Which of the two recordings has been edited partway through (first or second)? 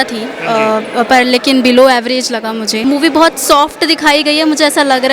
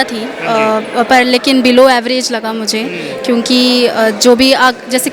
first